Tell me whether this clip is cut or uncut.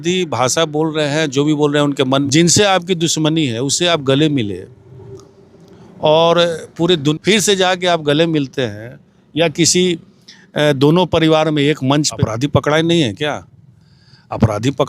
cut